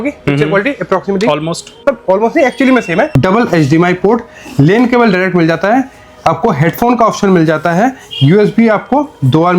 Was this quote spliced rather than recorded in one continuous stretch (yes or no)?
yes